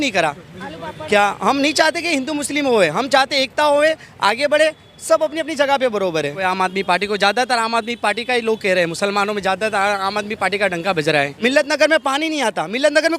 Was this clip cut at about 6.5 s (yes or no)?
yes